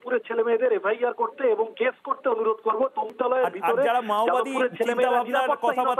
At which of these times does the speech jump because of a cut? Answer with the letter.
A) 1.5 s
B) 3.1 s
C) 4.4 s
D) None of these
B